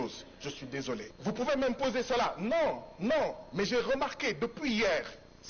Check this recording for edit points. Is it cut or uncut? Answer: cut